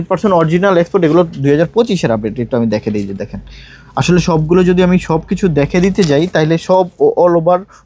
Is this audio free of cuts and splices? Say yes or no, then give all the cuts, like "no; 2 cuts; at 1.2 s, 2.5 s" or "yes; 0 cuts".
yes; 0 cuts